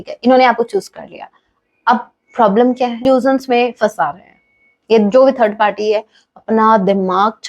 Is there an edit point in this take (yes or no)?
yes